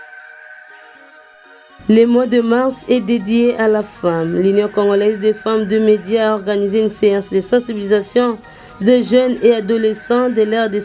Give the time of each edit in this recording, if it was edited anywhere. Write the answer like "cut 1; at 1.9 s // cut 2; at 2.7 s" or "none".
cut 1; at 1.6 s